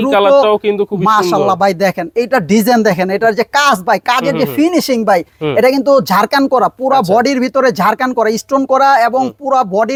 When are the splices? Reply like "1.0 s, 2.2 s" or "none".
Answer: none